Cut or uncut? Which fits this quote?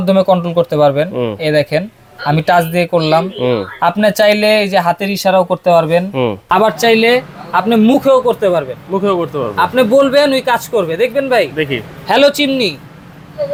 uncut